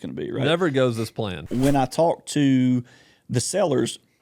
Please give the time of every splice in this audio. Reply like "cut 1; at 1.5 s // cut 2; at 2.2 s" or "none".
cut 1; at 1.4 s